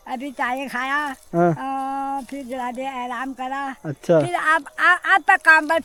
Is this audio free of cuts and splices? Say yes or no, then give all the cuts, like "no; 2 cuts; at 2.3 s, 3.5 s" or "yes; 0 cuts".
yes; 0 cuts